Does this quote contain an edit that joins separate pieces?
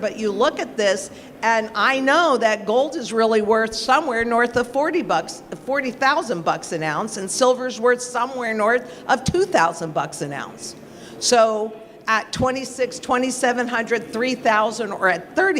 no; 0 cuts

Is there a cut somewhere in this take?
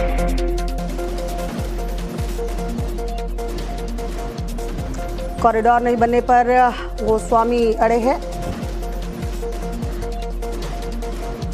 no; 0 cuts

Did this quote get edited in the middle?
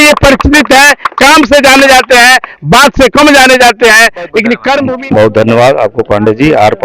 yes; 1 cut; at 4.8 s

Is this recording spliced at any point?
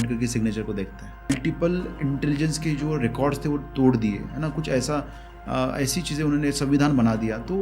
yes; 1 cut; at 1.3 s

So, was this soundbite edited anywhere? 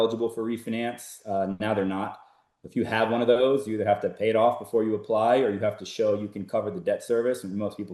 no; 0 cuts

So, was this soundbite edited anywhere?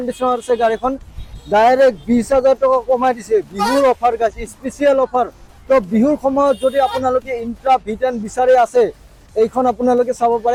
no; 0 cuts

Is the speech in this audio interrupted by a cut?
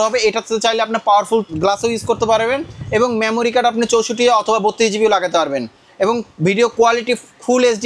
yes; 1 cut; at 1.5 s

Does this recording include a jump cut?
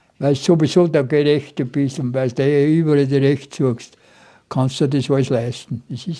no; 0 cuts

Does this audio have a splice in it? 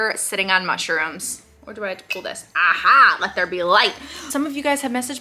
yes; 2 cuts; at 1.5 s, 4.3 s

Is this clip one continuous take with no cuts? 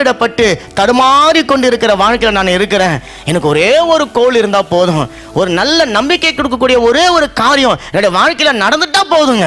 yes; 0 cuts

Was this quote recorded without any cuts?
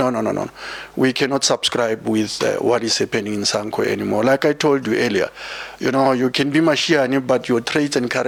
yes; 0 cuts

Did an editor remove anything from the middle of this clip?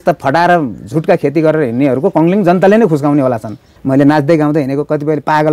yes; 1 cut; at 3.7 s

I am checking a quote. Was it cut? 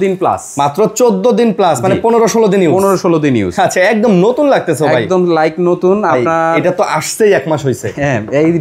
no; 0 cuts

